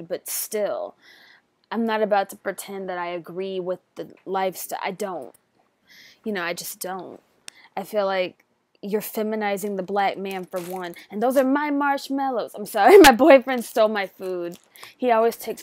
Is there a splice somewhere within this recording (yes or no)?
no